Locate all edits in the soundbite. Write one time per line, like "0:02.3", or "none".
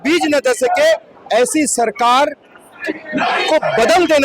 none